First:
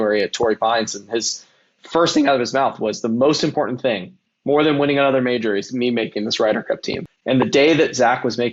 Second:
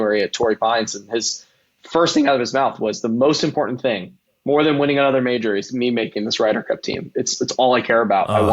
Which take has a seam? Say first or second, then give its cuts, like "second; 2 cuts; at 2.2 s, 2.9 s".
first; 1 cut; at 7.0 s